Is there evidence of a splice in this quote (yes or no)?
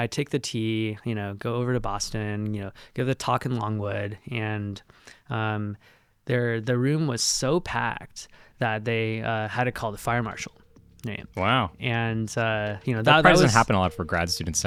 no